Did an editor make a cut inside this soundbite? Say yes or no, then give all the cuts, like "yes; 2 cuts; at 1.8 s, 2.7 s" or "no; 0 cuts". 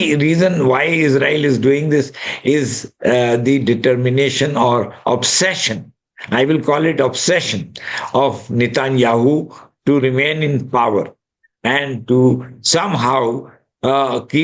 no; 0 cuts